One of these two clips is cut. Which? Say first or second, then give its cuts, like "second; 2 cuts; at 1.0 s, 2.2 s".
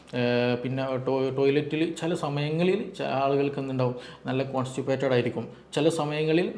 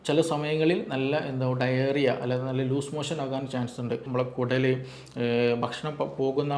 second; 1 cut; at 4.1 s